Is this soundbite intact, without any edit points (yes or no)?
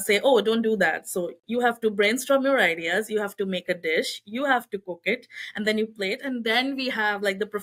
yes